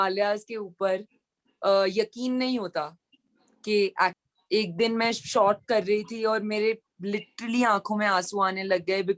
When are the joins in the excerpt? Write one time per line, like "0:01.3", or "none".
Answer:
0:04.3